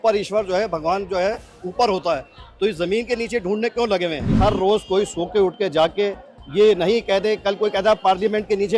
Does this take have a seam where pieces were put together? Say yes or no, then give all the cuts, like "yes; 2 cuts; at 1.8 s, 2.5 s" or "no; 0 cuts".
yes; 1 cut; at 4.4 s